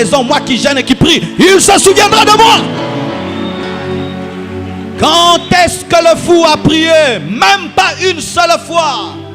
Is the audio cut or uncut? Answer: uncut